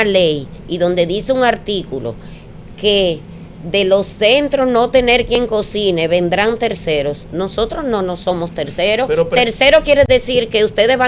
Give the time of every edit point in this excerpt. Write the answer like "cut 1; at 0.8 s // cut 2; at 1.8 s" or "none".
none